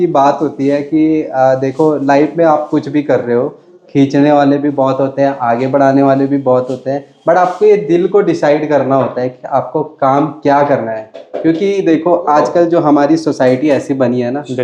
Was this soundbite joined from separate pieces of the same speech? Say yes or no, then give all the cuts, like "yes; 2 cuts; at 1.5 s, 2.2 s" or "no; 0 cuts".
no; 0 cuts